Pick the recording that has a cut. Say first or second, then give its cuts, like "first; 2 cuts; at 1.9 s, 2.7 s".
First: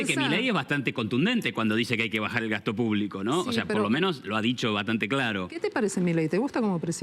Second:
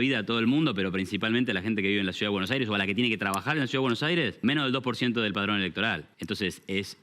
second; 2 cuts; at 4.3 s, 6.1 s